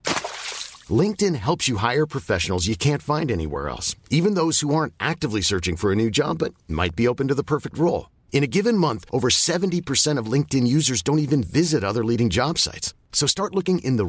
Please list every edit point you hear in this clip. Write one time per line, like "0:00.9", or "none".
none